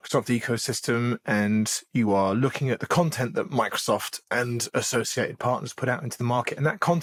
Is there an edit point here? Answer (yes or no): no